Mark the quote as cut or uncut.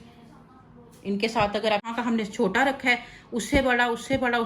cut